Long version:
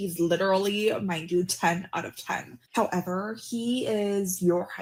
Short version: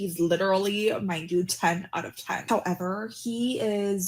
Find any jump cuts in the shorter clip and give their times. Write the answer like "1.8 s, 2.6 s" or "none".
2.4 s